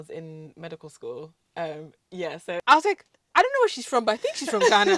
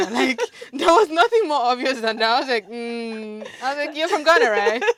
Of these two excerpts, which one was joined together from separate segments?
first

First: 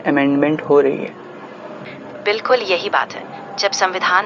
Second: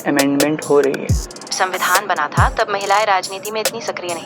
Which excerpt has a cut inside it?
second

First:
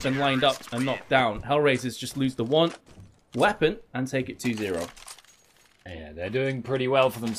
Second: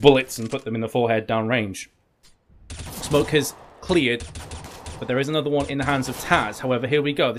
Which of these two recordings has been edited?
second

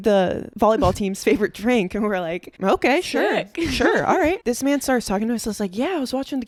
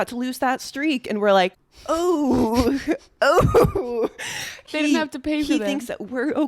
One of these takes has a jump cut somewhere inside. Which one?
second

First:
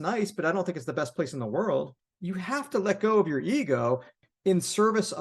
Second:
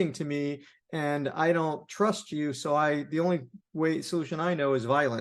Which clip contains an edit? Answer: first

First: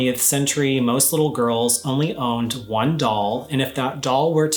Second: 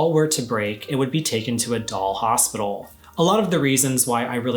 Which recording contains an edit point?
second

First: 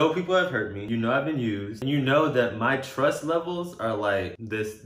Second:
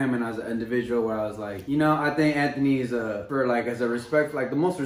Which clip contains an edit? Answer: second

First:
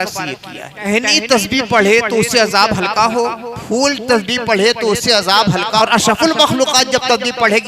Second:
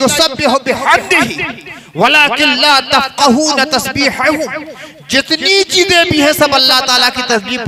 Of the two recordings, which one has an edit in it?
first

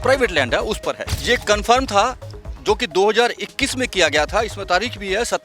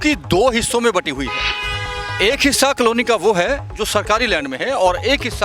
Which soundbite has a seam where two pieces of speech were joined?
first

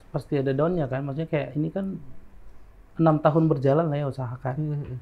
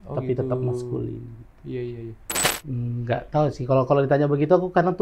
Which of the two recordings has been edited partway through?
second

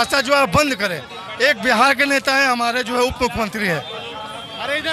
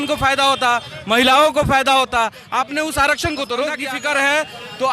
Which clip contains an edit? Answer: second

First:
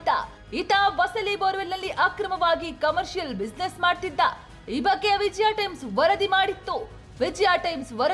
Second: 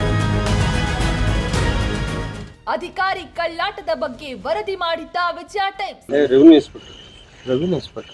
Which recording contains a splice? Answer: second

